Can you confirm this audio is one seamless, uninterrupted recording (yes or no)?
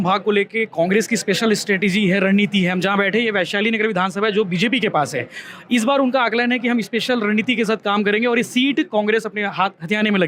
yes